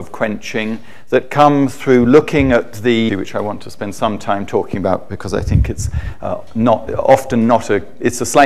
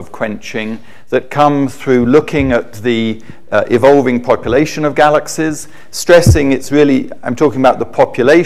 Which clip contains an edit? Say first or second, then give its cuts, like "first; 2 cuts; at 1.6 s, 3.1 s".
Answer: second; 1 cut; at 3.2 s